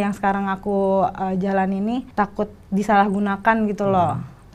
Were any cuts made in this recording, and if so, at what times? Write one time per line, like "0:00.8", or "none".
0:02.1

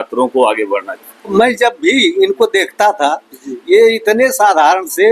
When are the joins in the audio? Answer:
0:01.3

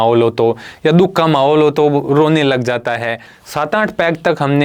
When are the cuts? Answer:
0:03.3

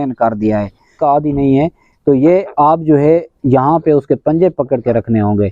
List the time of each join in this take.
0:01.0

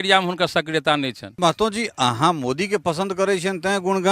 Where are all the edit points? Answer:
0:01.2

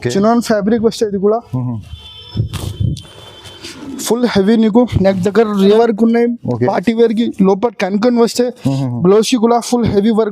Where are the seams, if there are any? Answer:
0:05.8

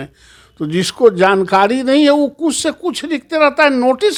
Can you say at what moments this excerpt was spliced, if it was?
none

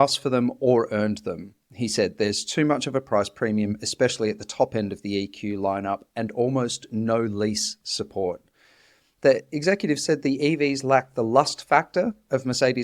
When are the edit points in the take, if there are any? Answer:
0:09.0

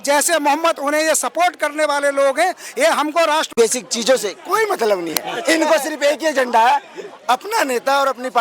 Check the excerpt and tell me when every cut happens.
0:03.5

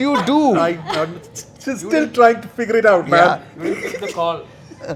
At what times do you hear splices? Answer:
none

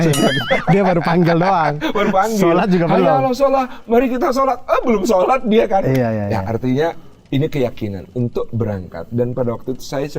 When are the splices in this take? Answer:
none

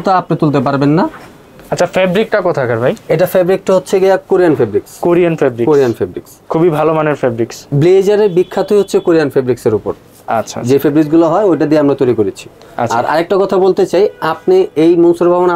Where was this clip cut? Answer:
none

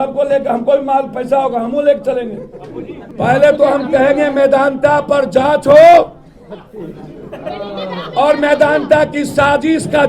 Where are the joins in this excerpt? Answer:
0:03.0

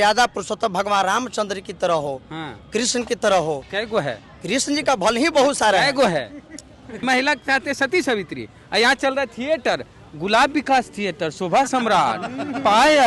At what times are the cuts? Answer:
0:07.0

